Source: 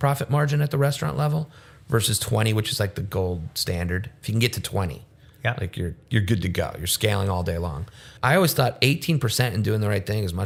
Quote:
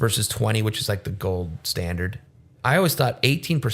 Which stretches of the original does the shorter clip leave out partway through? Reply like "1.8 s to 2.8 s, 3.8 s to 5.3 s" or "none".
4.2 s to 7.8 s

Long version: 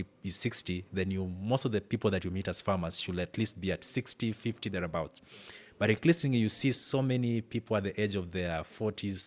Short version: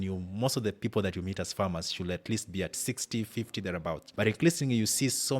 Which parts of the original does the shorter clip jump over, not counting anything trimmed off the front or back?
5.1 s to 5.7 s

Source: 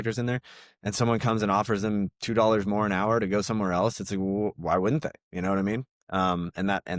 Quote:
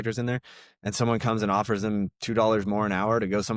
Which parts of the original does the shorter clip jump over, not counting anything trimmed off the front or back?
none

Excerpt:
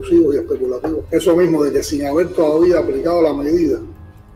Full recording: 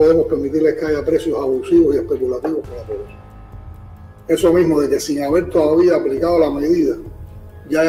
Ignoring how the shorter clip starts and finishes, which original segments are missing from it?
2.6 s to 4.2 s

